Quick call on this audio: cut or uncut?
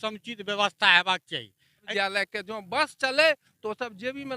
cut